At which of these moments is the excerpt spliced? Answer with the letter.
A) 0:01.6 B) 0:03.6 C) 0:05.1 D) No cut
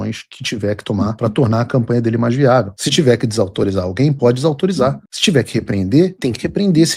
D